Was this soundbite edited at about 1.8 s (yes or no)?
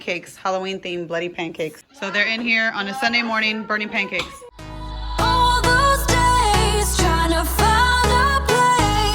yes